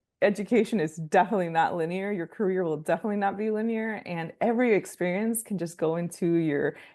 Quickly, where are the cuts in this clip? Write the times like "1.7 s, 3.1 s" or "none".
none